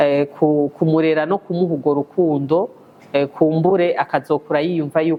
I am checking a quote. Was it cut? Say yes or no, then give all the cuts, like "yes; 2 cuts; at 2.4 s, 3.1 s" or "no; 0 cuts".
no; 0 cuts